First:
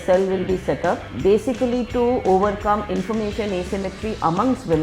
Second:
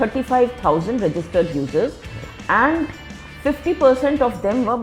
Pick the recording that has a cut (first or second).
first